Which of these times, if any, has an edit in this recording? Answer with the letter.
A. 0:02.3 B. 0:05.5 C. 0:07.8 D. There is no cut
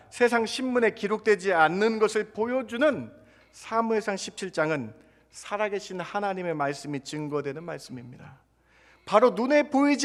D